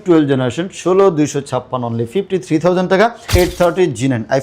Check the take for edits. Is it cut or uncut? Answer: cut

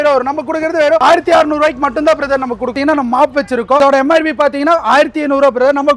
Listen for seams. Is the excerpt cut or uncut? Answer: cut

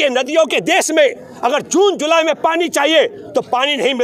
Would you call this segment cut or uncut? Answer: uncut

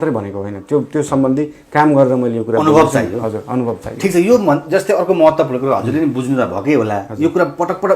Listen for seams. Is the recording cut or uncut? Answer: uncut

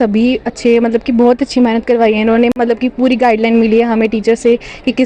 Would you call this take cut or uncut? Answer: cut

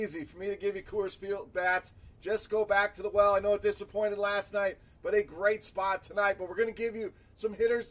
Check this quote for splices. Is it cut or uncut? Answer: uncut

